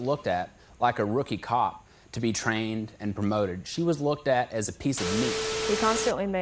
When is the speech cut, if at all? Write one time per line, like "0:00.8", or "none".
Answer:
0:05.5